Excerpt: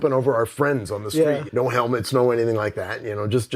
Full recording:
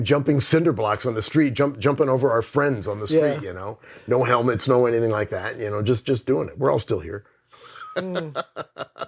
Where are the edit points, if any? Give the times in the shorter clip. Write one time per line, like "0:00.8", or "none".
0:01.4